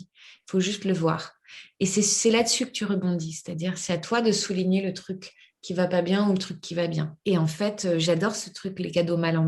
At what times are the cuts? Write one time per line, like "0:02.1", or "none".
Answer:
0:07.1